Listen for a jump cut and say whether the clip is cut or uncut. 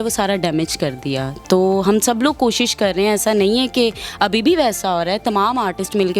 uncut